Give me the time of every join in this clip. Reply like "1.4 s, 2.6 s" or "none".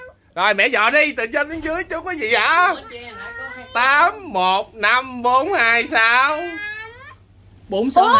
none